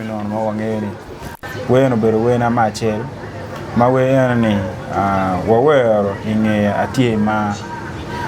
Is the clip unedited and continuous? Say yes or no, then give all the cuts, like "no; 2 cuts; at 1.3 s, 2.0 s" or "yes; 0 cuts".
no; 1 cut; at 1.3 s